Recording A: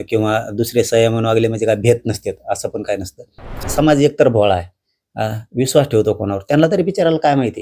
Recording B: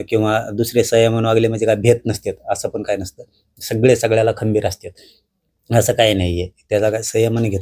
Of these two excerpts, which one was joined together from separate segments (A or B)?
A